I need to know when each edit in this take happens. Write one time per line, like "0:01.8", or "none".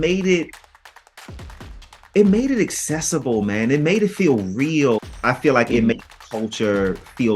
0:05.0

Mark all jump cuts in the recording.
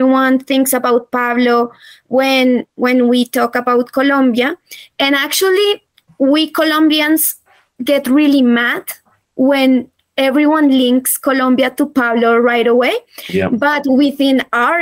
none

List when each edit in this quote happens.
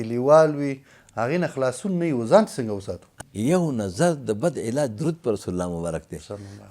0:03.1

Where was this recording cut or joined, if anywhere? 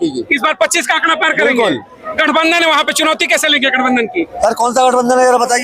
none

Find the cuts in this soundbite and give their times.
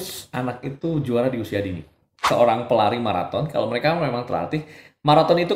0:02.1

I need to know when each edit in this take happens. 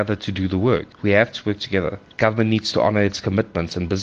0:00.9
0:02.0

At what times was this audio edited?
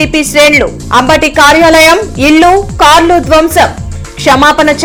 none

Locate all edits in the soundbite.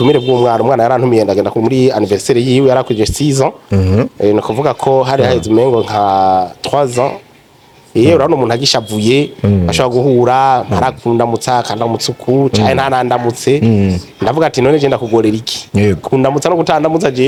none

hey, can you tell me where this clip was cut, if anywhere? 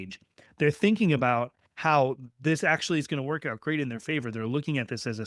none

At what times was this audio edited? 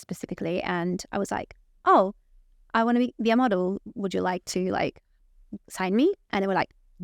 none

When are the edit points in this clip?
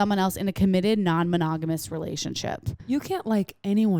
0:02.7

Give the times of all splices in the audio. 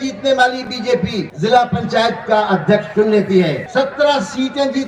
0:01.3
0:03.6

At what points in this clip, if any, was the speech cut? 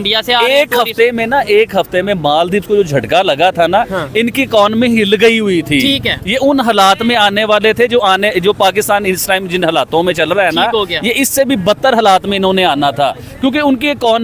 none

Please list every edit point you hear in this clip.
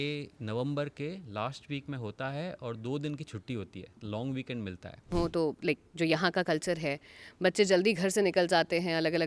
0:05.1

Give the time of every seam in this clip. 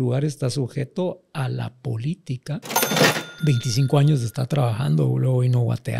0:02.8

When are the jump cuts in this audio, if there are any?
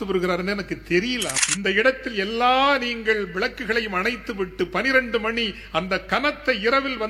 0:01.4

